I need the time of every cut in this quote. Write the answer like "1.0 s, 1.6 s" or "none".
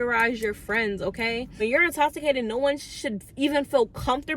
1.6 s